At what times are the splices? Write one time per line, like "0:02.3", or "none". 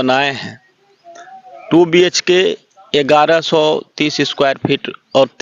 none